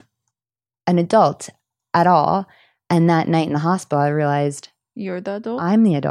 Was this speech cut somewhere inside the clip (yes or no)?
no